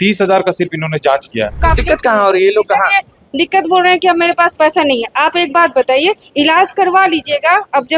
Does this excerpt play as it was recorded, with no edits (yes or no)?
no